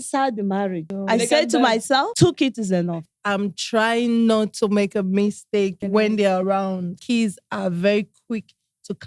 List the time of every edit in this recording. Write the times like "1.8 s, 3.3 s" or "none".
0.9 s, 2.1 s, 3.1 s, 5.8 s, 7.0 s